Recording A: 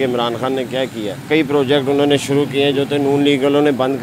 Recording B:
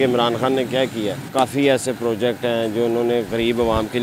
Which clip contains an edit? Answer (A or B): A